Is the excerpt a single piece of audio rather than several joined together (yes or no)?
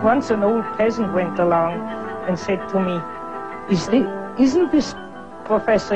no